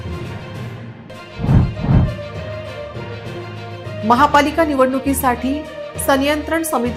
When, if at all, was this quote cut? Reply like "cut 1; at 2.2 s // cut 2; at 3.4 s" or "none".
none